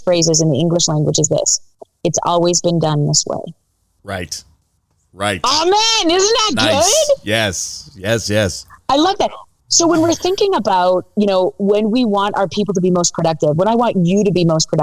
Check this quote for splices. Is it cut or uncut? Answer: uncut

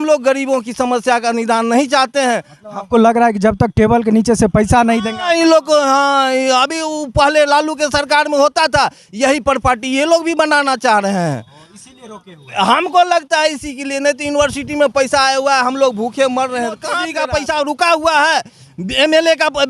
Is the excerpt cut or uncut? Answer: cut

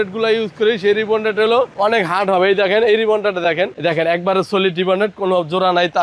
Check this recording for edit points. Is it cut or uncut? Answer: cut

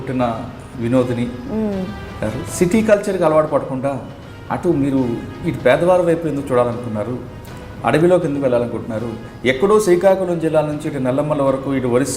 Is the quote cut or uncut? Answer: cut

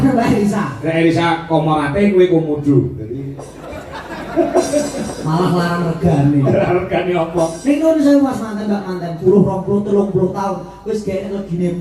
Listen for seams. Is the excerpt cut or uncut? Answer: cut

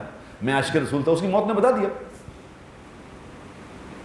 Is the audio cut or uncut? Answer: uncut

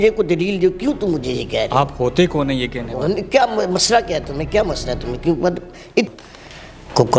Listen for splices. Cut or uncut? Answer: cut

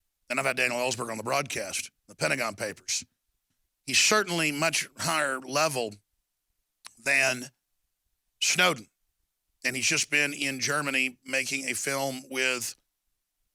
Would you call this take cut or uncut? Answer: uncut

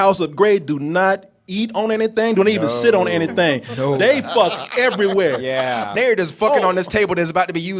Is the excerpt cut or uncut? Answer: cut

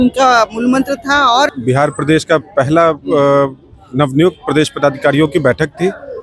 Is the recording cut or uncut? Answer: cut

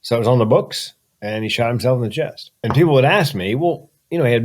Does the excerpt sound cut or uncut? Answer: cut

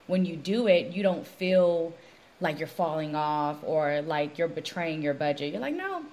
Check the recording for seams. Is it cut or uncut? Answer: uncut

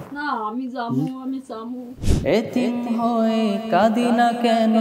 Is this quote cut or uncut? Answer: cut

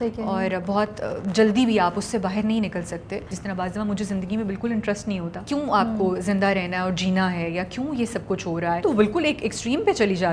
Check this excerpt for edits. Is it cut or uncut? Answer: cut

